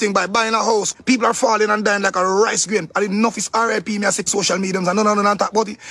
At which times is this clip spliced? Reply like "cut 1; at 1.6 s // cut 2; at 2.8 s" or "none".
cut 1; at 4.3 s